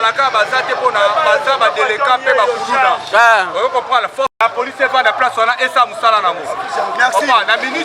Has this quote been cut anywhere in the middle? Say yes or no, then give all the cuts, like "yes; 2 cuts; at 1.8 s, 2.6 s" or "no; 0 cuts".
yes; 1 cut; at 4.3 s